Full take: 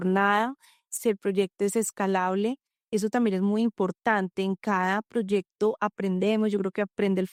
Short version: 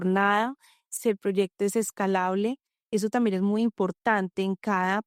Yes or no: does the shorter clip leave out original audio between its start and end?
no